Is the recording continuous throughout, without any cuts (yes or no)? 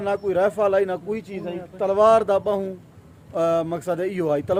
yes